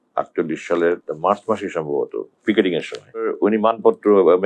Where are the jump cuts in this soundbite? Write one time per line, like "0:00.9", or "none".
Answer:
0:01.1
0:03.3